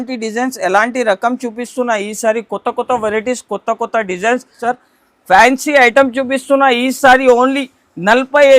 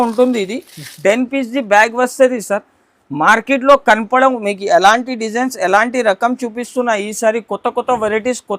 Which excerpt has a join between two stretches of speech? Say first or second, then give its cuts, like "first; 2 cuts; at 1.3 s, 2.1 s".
first; 1 cut; at 4.6 s